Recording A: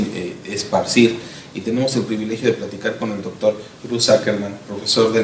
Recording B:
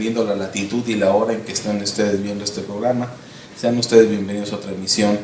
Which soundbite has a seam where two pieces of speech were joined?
A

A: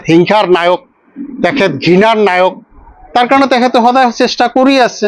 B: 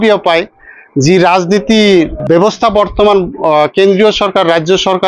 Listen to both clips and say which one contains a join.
B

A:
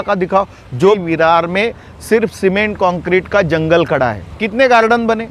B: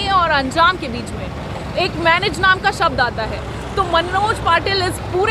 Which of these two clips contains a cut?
A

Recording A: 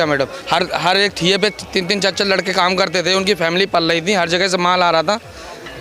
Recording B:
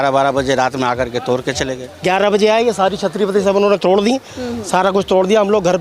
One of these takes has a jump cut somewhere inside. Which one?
B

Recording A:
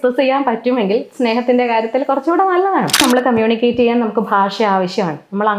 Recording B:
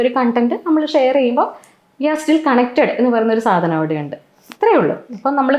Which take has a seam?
A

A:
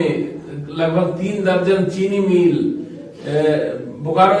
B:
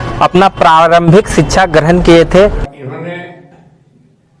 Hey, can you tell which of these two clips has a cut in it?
B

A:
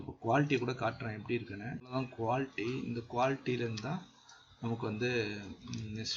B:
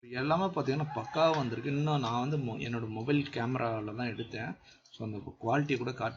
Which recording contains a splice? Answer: A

